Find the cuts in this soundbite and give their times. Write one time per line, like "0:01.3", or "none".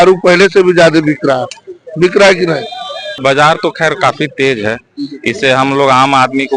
0:03.2